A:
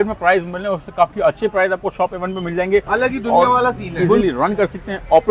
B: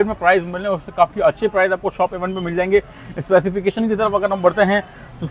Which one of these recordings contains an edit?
A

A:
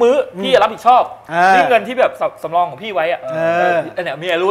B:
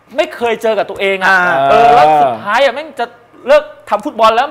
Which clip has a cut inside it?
A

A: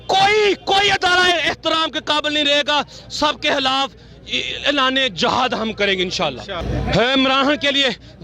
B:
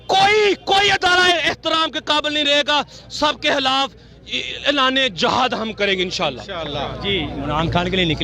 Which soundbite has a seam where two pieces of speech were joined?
A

